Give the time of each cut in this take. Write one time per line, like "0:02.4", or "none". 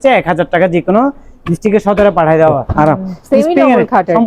0:02.7